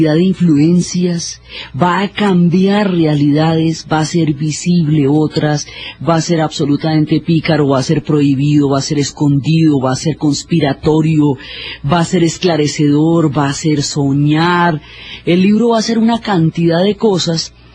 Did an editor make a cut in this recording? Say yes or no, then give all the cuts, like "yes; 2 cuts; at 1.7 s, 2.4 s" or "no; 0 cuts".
yes; 1 cut; at 16.5 s